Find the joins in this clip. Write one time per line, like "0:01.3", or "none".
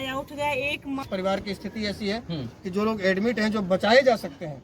0:01.0